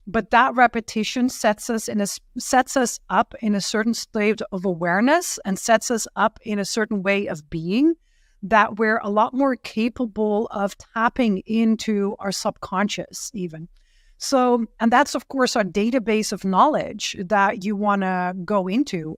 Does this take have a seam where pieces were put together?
no; 0 cuts

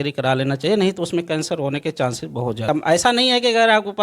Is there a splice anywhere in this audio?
yes; 1 cut; at 2.7 s

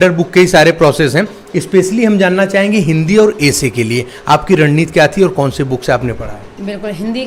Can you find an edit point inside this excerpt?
no; 0 cuts

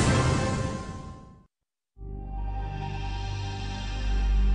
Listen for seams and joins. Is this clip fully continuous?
no; 1 cut; at 1.2 s

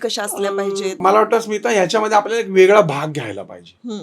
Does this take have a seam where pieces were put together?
yes; 1 cut; at 1.0 s

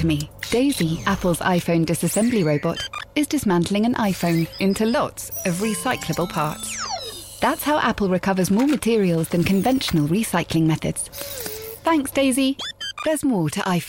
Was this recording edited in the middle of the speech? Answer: no; 0 cuts

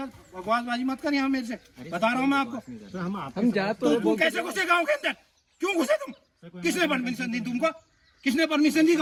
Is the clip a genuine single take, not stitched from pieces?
yes; 0 cuts

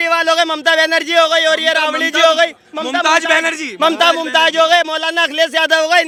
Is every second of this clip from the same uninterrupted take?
yes; 0 cuts

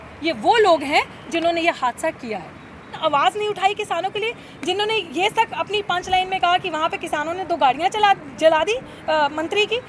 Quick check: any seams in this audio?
yes; 1 cut; at 3.0 s

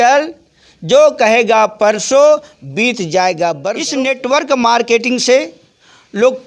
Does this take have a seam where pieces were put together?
yes; 1 cut; at 3.8 s

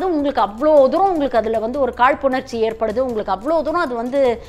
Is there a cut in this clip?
no; 0 cuts

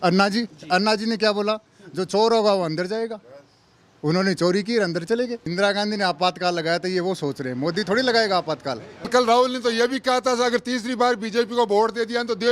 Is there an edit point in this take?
yes; 2 cuts; at 5.5 s, 9.1 s

